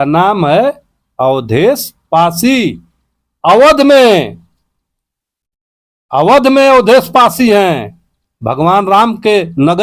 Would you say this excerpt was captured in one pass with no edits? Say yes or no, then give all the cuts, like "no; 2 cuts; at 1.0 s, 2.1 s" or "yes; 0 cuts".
yes; 0 cuts